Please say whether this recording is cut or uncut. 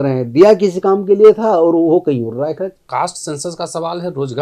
cut